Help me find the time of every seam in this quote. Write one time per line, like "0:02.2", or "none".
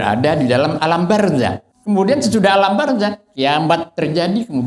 0:01.7